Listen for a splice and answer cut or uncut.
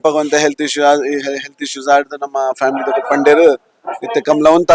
uncut